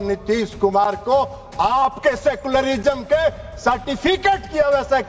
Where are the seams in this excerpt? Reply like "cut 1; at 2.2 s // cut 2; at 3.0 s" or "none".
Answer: none